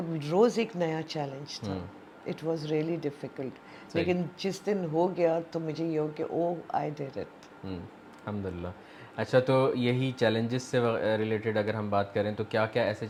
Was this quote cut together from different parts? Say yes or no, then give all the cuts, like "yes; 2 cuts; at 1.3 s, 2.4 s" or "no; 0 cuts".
no; 0 cuts